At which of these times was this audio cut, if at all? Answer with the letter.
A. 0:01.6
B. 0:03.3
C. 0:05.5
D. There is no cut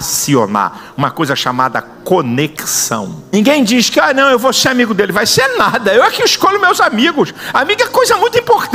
B